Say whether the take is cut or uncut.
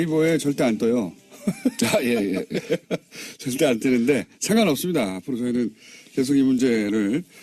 uncut